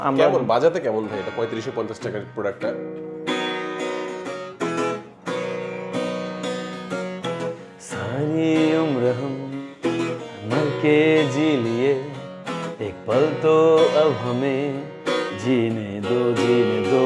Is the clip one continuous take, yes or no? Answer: yes